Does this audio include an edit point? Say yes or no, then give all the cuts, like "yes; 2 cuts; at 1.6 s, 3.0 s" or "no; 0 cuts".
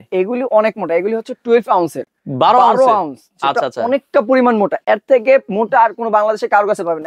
no; 0 cuts